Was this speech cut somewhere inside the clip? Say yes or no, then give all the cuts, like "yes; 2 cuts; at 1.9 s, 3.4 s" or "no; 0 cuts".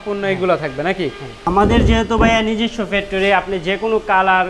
yes; 1 cut; at 1.4 s